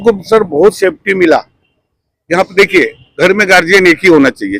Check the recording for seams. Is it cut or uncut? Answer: uncut